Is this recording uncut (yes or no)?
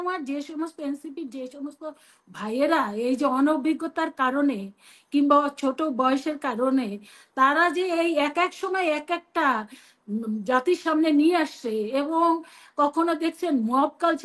yes